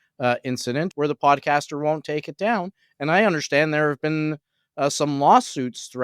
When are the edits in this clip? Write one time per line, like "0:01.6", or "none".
0:00.9